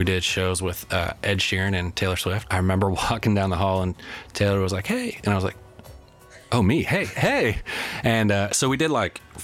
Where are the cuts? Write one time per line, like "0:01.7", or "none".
0:02.4